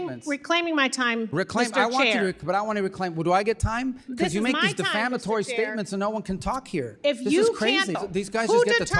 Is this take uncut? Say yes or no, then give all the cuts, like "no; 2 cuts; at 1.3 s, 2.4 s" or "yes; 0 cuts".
no; 1 cut; at 8.0 s